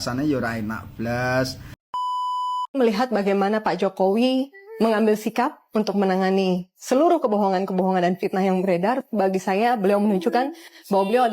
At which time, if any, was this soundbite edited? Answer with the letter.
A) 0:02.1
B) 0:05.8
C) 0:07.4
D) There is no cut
A